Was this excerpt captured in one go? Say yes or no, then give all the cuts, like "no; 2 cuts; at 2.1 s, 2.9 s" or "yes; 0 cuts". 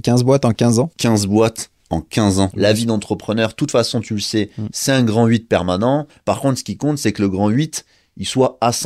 no; 3 cuts; at 0.9 s, 2.5 s, 6.2 s